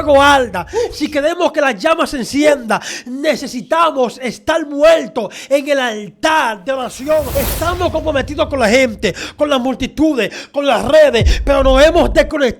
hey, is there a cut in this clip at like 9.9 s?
no; 1 cut; at 7.3 s

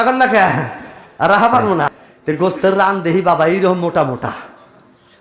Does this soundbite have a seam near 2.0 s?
yes; 1 cut; at 2.0 s

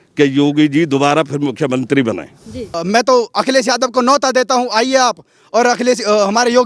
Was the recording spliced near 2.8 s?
yes; 1 cut; at 2.8 s

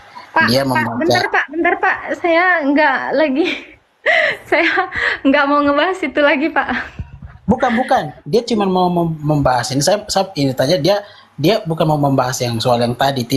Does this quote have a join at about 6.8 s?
yes; 1 cut; at 6.8 s

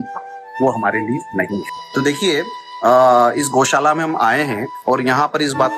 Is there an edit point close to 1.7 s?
yes; 1 cut; at 1.7 s

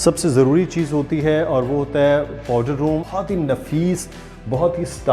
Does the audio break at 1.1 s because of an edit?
no; 1 cut; at 3.0 s

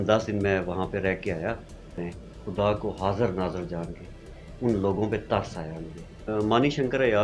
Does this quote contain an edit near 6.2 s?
yes; 2 cuts; at 2.0 s, 6.2 s

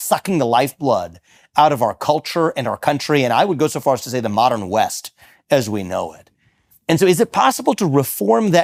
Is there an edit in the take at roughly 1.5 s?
no; 0 cuts

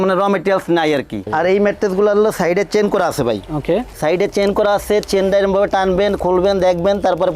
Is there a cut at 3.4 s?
no; 1 cut; at 1.3 s

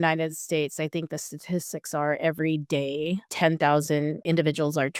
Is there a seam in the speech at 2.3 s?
no; 0 cuts

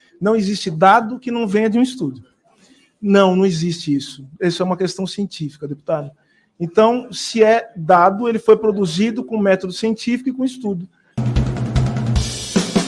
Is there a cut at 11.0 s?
yes; 1 cut; at 11.0 s

